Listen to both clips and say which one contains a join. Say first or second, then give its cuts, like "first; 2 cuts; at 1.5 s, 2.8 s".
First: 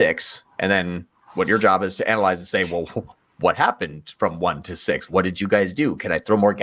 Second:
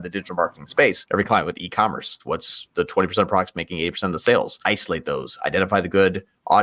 second; 3 cuts; at 1.0 s, 2.2 s, 4.5 s